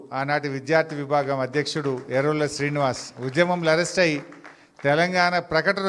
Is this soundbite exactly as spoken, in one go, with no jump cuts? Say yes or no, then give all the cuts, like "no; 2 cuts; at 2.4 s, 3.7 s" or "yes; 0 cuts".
yes; 0 cuts